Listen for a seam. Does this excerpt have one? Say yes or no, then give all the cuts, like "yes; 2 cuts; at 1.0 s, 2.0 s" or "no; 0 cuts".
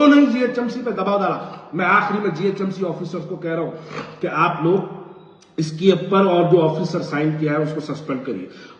no; 0 cuts